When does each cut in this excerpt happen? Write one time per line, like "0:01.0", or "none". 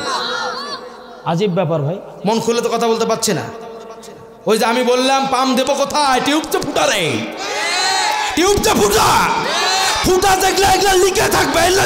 0:02.1